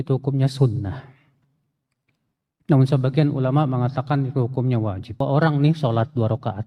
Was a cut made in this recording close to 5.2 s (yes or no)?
yes